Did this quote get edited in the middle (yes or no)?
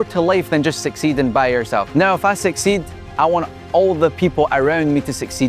yes